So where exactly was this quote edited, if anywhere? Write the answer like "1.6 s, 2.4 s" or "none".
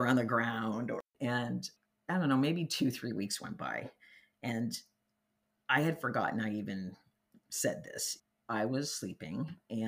0.9 s, 8.0 s